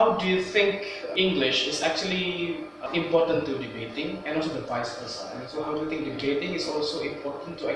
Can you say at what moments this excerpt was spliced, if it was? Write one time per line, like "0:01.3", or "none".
0:01.0
0:02.8

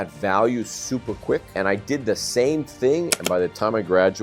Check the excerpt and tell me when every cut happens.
0:01.5

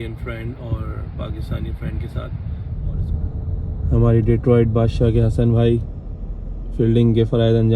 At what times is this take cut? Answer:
0:02.7

